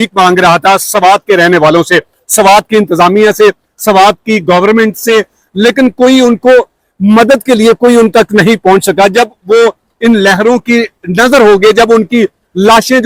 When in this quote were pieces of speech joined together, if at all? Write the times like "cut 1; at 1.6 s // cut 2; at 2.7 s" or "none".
none